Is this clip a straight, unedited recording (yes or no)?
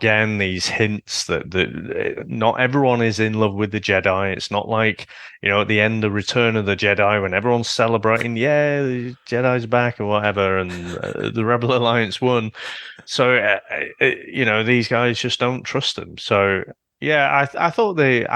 yes